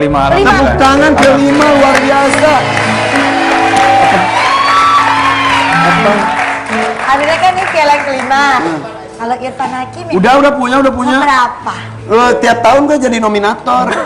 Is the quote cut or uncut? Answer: uncut